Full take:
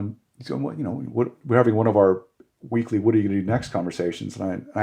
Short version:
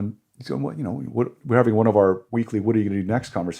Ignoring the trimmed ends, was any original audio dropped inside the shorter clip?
yes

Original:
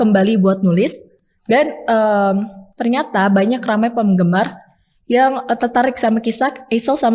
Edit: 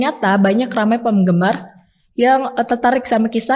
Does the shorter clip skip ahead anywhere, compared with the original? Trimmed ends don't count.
no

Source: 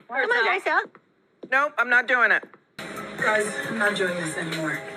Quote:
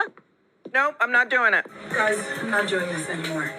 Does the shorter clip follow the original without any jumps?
no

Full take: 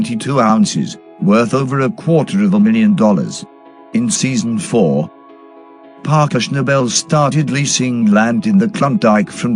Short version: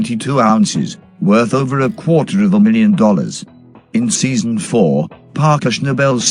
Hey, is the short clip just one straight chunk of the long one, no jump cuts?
no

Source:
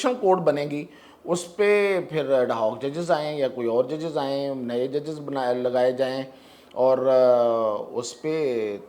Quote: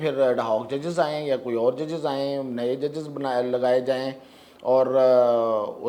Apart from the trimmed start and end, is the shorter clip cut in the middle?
no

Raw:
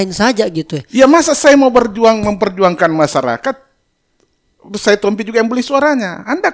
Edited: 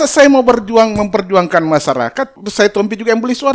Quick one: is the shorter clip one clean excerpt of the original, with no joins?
no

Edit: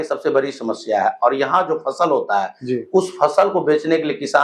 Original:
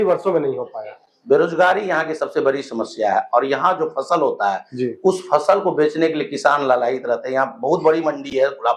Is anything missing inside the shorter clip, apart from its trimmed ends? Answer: no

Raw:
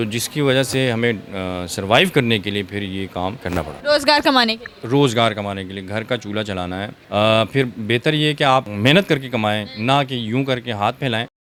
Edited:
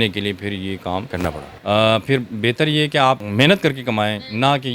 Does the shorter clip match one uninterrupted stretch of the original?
no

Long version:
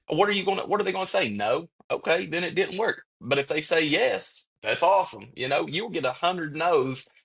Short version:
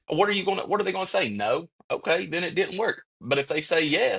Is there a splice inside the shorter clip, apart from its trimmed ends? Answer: no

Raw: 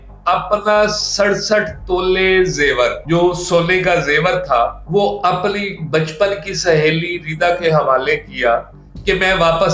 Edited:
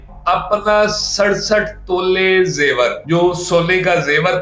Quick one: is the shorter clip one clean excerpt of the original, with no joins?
yes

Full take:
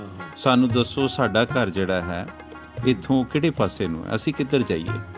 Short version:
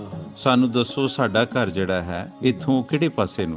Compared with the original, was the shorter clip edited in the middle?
yes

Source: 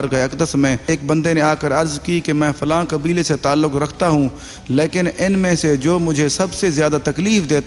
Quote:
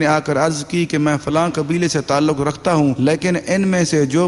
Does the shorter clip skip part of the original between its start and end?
yes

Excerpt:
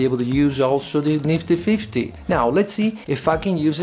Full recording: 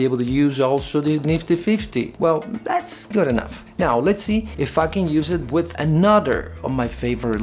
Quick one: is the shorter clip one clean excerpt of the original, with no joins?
no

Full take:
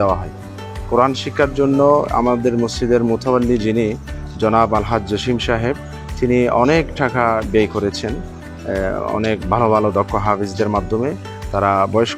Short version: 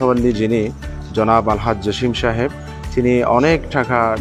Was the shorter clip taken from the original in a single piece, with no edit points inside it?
yes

